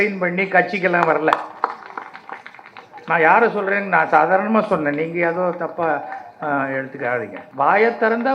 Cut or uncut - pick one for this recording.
cut